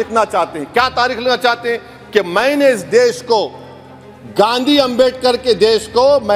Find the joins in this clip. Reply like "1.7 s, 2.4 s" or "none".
none